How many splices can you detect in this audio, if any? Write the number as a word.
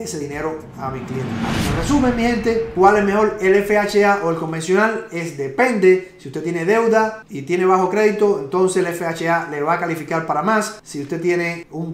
one